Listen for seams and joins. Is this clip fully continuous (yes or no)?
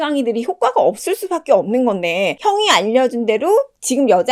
no